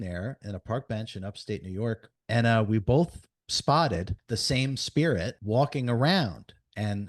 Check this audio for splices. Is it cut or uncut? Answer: cut